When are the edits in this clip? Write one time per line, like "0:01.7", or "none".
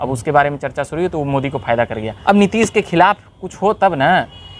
0:02.1